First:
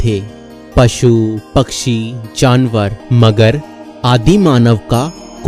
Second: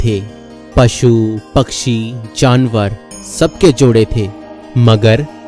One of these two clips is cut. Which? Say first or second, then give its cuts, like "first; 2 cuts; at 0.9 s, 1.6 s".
first; 1 cut; at 3.0 s